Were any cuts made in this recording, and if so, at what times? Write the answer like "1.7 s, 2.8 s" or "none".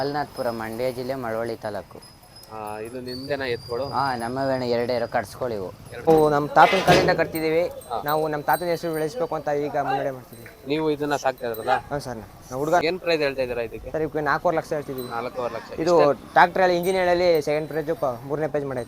6.1 s, 12.8 s